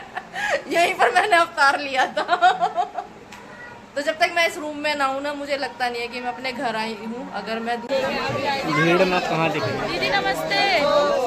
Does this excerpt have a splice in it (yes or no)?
yes